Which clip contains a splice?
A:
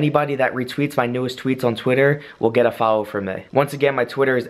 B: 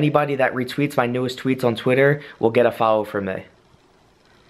A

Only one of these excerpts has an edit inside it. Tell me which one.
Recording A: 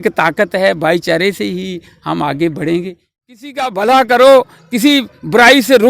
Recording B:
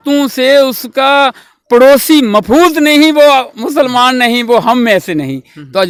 A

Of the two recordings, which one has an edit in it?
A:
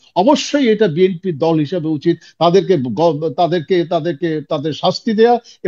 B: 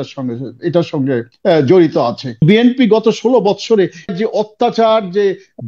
B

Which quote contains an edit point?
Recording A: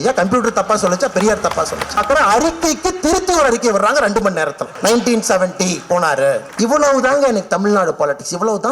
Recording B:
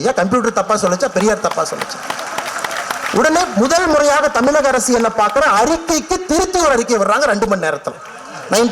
A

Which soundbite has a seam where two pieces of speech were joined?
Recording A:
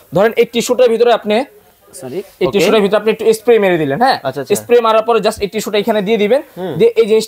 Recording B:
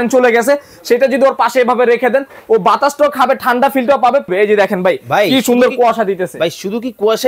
B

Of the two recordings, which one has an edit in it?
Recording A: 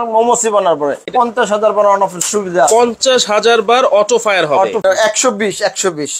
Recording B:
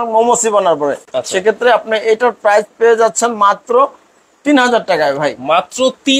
A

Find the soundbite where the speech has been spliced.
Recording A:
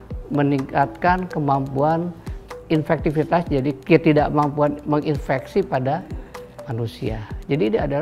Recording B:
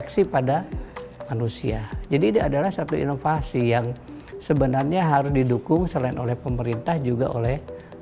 A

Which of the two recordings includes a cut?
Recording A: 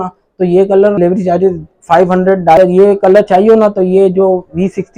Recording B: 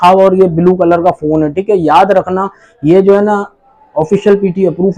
A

